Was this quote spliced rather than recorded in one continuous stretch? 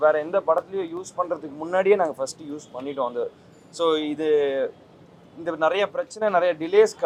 no; 0 cuts

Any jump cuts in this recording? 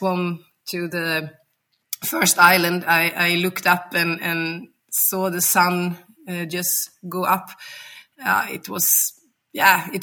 no; 0 cuts

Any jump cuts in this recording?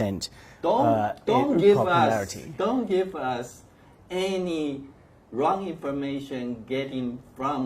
no; 0 cuts

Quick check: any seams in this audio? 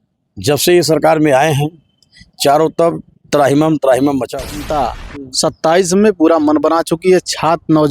yes; 1 cut; at 4.3 s

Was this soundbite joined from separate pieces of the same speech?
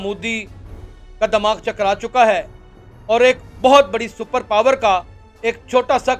no; 0 cuts

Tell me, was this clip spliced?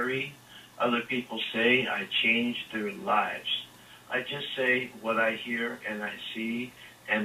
yes; 1 cut; at 4.7 s

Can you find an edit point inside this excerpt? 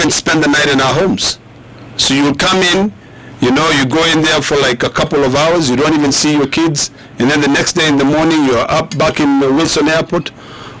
no; 0 cuts

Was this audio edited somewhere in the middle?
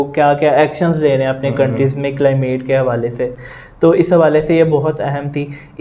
no; 0 cuts

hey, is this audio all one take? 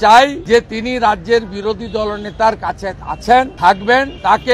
yes; 0 cuts

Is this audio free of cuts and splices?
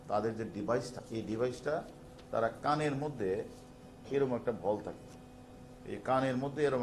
no; 2 cuts; at 1.0 s, 5.8 s

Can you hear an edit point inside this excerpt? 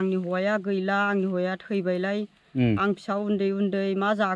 no; 0 cuts

